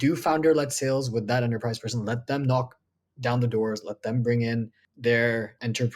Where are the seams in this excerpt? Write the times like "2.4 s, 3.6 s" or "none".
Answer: 4.8 s

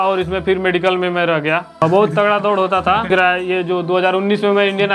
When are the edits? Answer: 1.7 s, 3.1 s

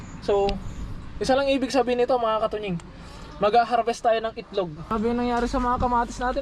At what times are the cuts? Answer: 4.9 s

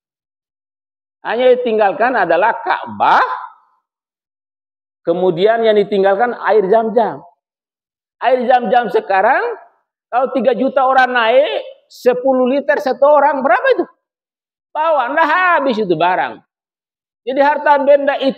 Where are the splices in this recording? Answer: none

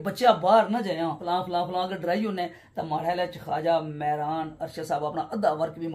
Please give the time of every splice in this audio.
1.2 s

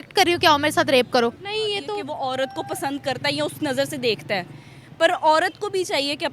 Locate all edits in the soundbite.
2.1 s

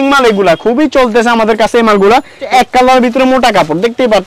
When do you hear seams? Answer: 2.4 s

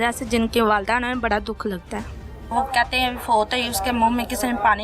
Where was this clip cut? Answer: 2.4 s

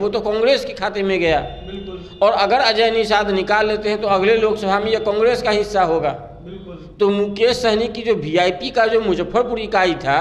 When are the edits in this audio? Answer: none

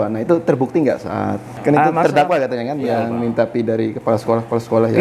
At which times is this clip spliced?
1.6 s

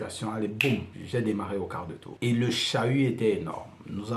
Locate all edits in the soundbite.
1.0 s, 2.0 s

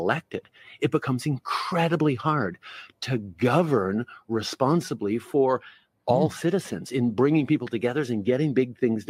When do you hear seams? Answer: 7.2 s

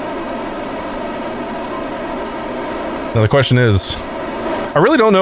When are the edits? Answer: 1.0 s, 3.1 s

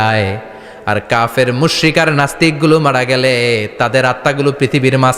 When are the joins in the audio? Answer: none

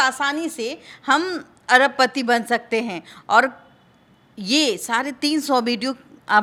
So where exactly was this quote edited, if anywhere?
none

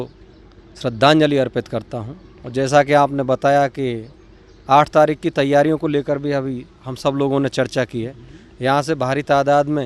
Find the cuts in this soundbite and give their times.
none

